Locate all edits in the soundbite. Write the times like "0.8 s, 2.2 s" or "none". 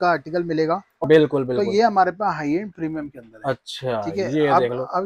1.0 s

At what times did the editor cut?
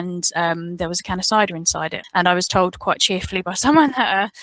1.9 s

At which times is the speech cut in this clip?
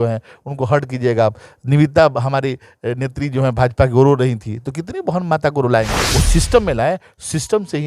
6.0 s

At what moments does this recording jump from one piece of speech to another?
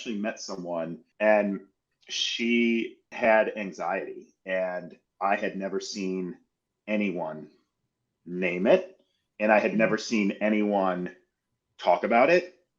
1.0 s, 3.0 s

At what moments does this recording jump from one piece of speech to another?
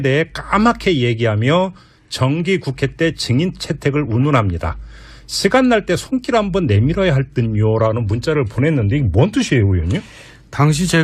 1.3 s

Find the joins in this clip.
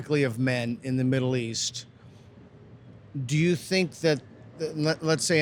none

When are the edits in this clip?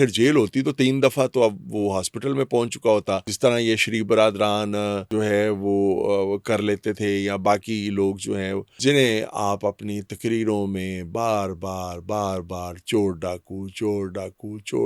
3.3 s, 5.1 s, 8.7 s

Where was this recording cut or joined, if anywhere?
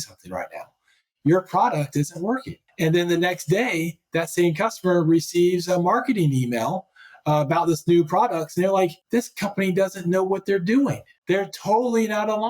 2.6 s, 9.0 s, 11.2 s

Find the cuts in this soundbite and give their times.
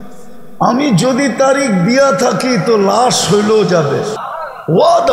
4.2 s

